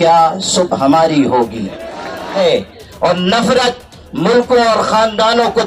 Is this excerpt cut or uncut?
cut